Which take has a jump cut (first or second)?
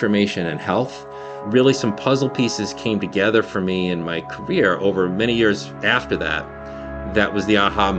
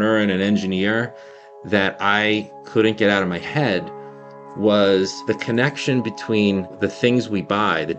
second